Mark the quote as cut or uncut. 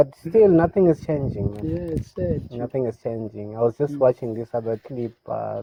uncut